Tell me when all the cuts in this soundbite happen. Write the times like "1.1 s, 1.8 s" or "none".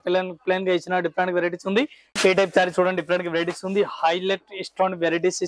2.0 s